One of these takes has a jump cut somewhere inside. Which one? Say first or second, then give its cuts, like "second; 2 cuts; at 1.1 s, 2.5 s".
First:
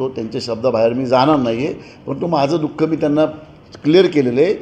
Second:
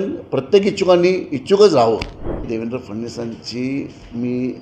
second; 1 cut; at 2.5 s